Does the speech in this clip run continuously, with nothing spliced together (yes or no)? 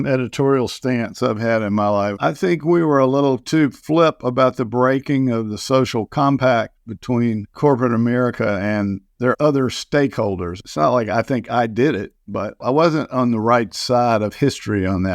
no